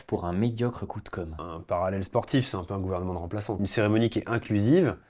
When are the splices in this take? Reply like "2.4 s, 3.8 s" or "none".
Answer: 1.5 s, 3.6 s